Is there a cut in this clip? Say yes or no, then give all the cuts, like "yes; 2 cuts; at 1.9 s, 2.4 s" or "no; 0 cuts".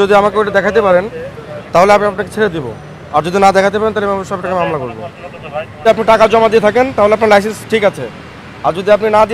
yes; 1 cut; at 5.9 s